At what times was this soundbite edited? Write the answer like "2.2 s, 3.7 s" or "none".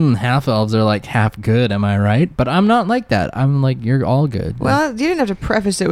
none